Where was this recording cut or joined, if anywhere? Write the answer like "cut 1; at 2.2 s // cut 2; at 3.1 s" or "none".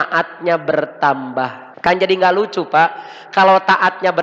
cut 1; at 1.6 s